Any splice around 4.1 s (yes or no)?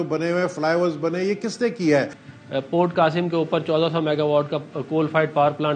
no